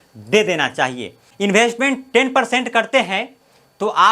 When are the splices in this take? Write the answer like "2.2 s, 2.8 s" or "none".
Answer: 1.2 s